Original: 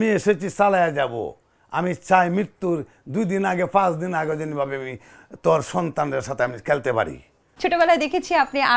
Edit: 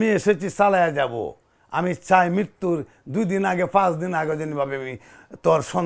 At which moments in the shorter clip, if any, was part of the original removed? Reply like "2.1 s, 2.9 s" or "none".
none